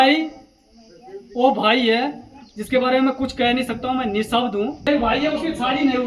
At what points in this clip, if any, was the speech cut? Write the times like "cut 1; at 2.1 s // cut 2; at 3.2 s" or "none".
cut 1; at 4.8 s